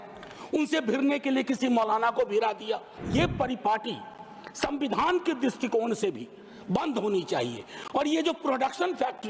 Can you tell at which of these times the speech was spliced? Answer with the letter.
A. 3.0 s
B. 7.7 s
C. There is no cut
A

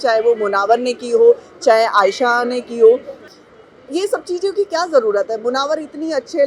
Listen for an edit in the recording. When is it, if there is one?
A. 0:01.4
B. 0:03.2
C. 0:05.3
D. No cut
B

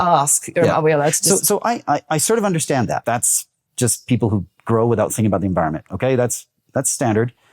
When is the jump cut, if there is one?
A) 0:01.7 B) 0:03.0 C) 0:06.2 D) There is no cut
B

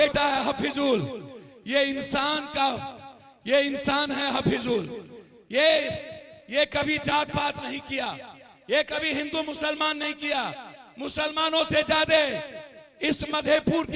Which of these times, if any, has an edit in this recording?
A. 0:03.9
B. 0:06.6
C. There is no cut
C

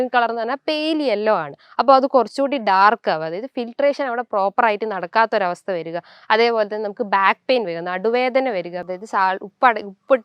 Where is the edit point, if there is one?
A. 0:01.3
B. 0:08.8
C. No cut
B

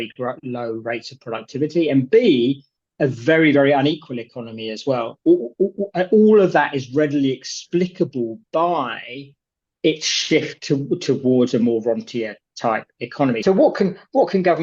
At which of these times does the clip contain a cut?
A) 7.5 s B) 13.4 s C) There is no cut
B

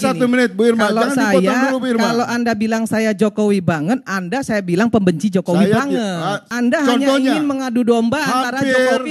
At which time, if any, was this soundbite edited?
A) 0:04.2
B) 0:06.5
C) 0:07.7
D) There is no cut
B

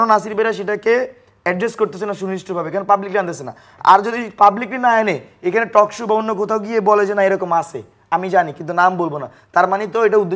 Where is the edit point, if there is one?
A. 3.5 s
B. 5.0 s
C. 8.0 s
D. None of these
D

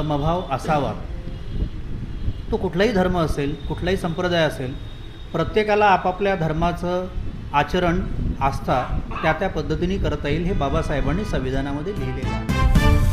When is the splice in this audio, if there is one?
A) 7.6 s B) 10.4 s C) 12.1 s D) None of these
C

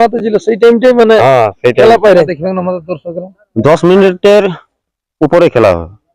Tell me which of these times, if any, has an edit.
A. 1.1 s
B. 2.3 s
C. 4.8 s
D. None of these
B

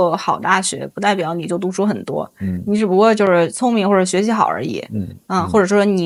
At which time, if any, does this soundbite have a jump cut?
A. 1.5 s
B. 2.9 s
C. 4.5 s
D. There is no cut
D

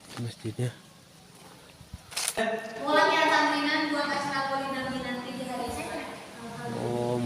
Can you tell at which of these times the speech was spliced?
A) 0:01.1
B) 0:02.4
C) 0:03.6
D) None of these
B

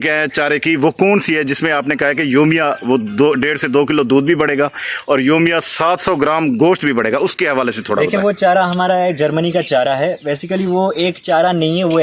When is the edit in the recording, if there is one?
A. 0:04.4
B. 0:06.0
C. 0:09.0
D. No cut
D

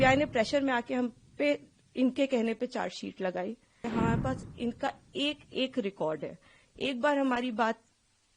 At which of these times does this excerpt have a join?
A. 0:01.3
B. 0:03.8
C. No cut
B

